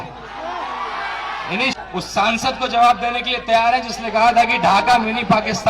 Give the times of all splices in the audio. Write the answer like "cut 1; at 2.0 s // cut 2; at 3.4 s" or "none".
cut 1; at 1.7 s